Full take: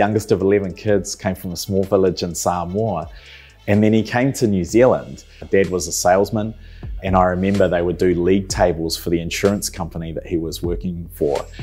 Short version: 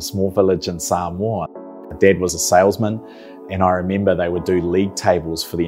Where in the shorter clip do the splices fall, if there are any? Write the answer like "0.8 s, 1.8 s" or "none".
2.1 s